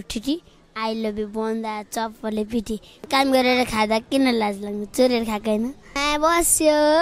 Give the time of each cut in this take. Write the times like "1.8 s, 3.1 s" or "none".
3.0 s, 6.0 s